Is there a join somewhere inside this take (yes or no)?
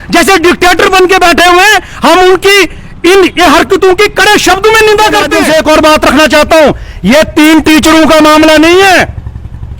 yes